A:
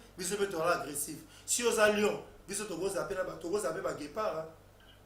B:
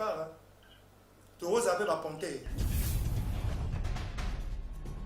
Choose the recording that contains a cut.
B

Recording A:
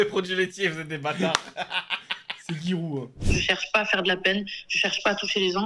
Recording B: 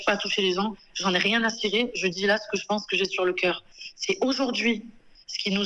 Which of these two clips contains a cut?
A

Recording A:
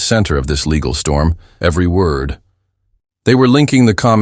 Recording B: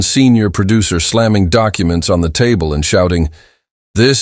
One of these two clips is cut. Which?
A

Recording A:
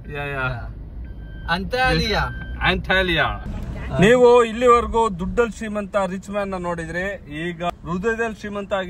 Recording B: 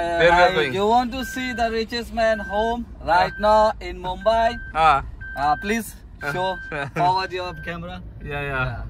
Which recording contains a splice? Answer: A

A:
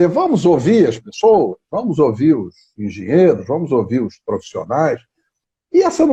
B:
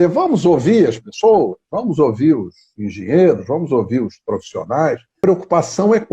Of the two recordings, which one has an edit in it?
B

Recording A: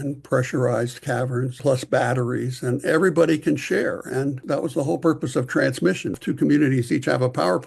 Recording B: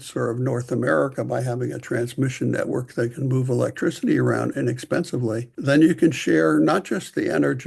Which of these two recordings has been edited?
A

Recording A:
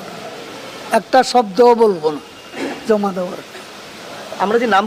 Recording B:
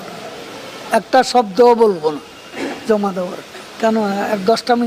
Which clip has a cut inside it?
B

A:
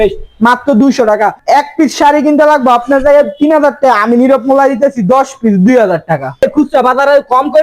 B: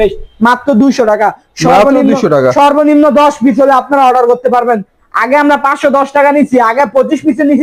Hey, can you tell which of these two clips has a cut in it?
A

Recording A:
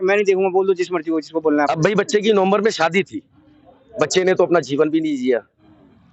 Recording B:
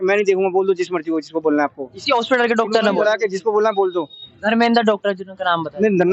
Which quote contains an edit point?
A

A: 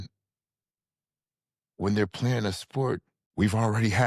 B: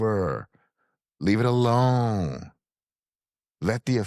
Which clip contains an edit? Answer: A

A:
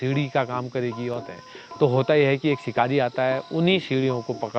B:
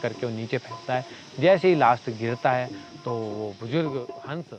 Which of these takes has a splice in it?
A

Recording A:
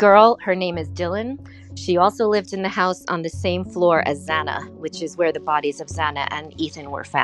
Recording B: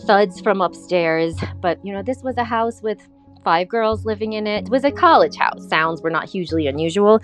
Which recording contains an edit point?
B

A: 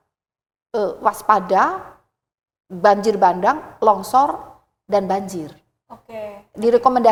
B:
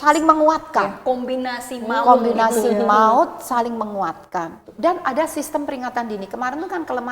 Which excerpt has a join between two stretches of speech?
B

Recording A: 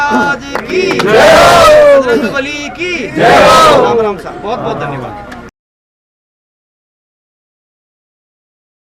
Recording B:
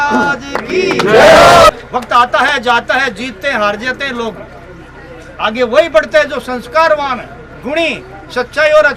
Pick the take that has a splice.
B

